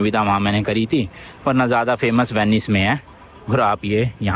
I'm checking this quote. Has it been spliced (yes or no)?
no